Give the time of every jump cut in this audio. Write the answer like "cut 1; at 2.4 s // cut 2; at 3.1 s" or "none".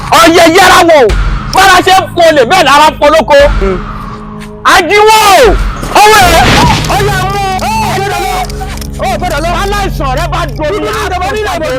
none